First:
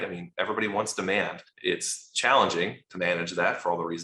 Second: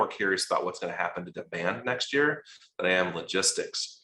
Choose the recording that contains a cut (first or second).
first